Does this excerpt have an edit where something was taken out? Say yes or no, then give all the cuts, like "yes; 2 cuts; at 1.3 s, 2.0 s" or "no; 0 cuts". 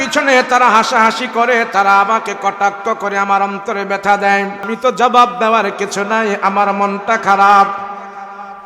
yes; 1 cut; at 4.7 s